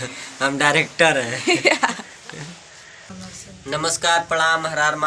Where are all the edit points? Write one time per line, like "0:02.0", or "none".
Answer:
0:03.1